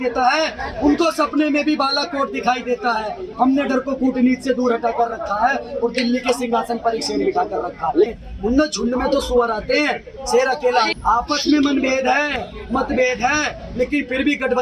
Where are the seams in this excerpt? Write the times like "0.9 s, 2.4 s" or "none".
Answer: 8.2 s, 10.9 s